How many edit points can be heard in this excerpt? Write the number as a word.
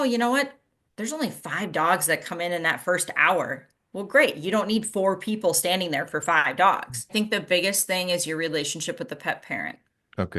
one